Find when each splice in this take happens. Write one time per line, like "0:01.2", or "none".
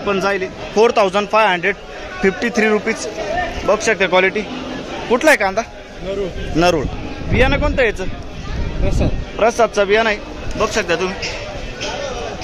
none